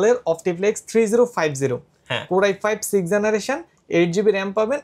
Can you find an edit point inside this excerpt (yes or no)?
no